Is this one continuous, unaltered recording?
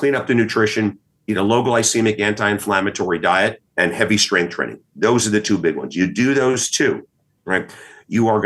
no; 1 cut; at 3.6 s

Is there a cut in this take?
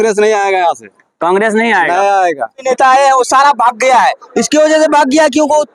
yes; 1 cut; at 2.6 s

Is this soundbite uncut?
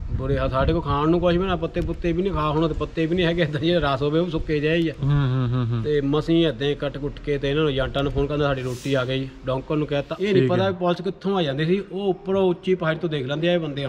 no; 1 cut; at 10.1 s

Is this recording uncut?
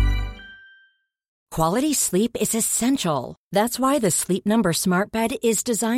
no; 1 cut; at 1.4 s

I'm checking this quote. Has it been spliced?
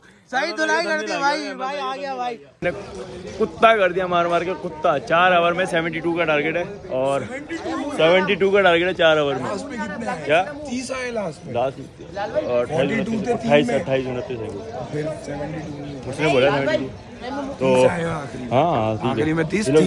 no; 0 cuts

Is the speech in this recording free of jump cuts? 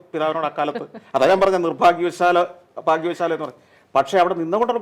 yes; 0 cuts

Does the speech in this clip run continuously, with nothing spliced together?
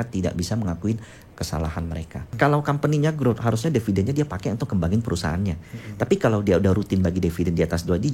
no; 1 cut; at 2.3 s

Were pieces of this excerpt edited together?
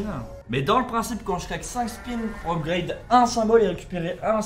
no; 0 cuts

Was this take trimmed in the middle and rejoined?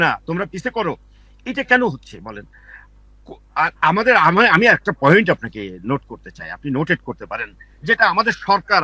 no; 0 cuts

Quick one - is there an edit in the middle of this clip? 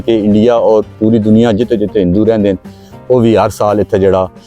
no; 0 cuts

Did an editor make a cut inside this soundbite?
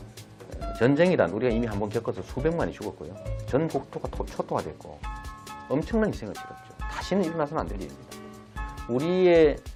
no; 0 cuts

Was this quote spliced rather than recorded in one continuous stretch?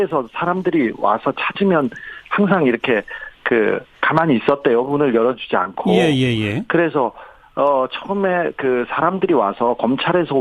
yes; 1 cut; at 3.0 s

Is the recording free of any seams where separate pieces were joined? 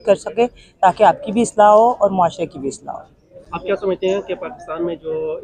yes; 0 cuts

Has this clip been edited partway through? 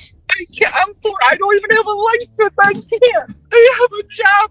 yes; 1 cut; at 3.4 s

